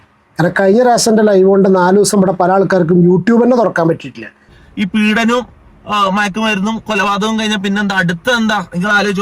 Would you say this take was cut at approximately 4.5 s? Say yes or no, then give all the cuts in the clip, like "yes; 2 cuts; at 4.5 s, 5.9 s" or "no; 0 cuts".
yes; 1 cut; at 4.5 s